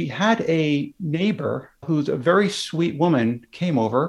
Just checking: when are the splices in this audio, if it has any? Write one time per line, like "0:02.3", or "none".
0:01.8